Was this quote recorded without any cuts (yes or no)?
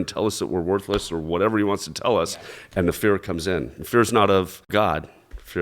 no